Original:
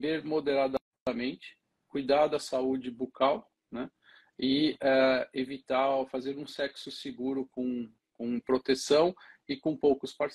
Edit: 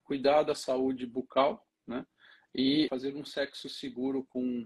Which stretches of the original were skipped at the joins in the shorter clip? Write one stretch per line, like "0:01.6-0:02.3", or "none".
0:04.8-0:06.1